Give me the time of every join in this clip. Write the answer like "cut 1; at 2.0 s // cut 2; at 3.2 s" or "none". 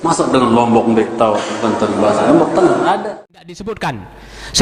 cut 1; at 3.0 s